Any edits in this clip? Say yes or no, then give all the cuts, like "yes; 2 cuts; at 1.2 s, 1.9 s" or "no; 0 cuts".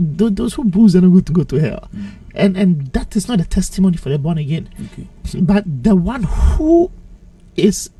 no; 0 cuts